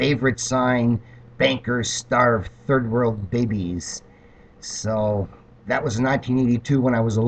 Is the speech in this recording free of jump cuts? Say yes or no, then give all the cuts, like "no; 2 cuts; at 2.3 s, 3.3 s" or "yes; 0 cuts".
yes; 0 cuts